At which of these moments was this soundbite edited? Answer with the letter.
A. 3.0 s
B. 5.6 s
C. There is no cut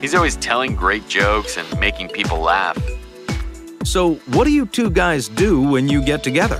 B